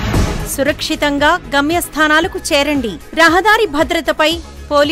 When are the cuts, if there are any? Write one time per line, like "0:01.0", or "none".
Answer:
none

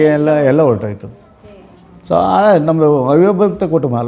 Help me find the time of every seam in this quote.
none

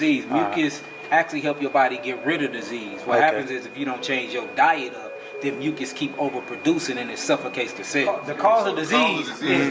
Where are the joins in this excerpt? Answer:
0:08.2

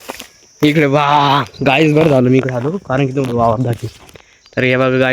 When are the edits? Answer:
none

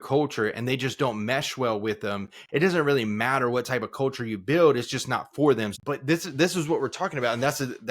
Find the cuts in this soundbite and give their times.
0:05.7

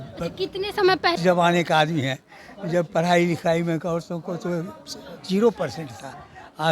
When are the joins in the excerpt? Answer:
0:01.2

